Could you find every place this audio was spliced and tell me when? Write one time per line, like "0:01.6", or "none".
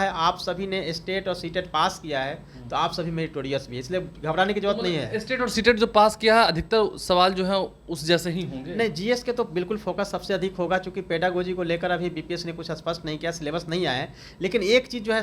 none